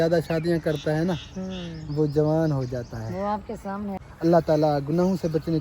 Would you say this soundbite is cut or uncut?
cut